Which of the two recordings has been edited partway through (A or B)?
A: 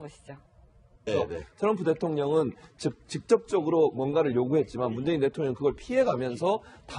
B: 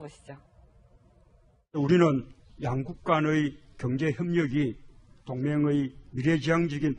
B